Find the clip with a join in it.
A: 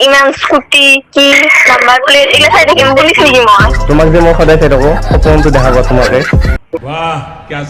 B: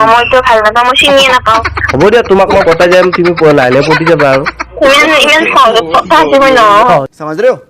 B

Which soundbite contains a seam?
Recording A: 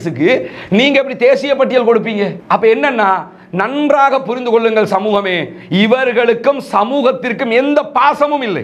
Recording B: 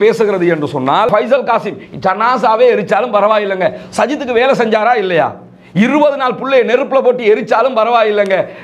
B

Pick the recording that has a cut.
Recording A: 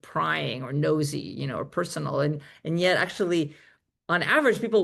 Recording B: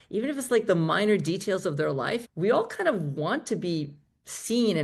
B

